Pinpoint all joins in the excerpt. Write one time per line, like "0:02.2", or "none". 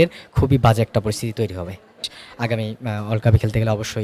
0:02.2